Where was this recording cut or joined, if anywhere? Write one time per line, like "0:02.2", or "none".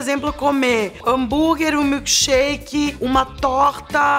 0:01.0